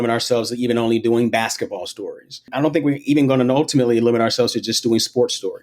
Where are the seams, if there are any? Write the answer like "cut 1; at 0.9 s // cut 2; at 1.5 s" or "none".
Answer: cut 1; at 2.5 s